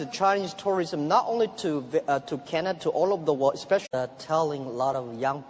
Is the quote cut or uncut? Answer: uncut